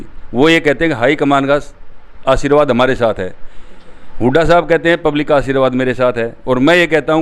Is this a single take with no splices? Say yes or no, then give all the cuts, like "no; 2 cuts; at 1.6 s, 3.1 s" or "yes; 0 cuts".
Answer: yes; 0 cuts